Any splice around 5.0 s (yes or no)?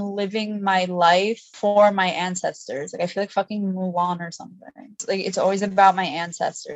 yes